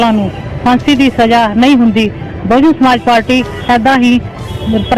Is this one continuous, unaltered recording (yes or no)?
yes